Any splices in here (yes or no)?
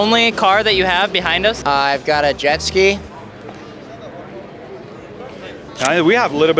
no